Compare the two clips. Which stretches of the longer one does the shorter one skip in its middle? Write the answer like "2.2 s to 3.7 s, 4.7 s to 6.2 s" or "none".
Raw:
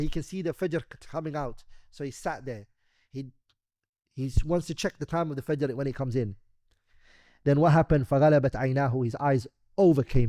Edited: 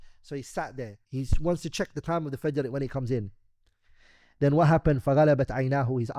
2.7 s to 4.0 s